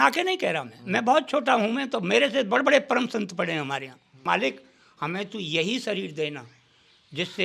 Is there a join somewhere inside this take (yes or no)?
yes